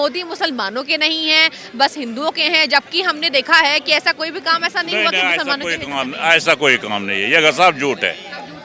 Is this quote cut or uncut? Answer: uncut